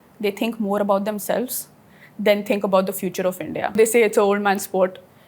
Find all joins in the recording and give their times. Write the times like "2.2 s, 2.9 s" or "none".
3.8 s